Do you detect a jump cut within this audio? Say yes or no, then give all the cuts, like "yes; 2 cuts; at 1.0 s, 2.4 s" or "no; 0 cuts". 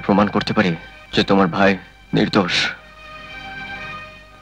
yes; 2 cuts; at 0.9 s, 1.9 s